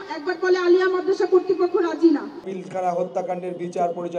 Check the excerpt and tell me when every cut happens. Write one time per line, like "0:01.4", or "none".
0:02.5